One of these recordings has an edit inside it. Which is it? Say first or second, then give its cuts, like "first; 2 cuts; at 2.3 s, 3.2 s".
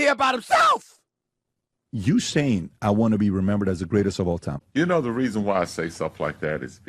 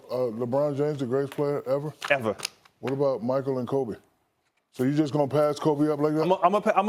first; 1 cut; at 4.5 s